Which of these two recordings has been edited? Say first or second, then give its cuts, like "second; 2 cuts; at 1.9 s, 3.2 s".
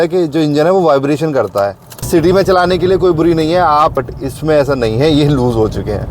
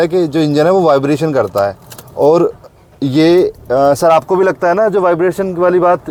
first; 2 cuts; at 2.1 s, 3.9 s